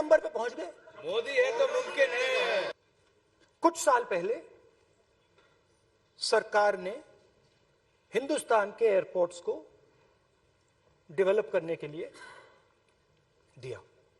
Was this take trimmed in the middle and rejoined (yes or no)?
yes